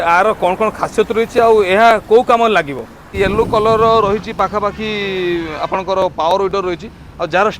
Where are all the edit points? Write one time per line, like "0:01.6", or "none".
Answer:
0:03.2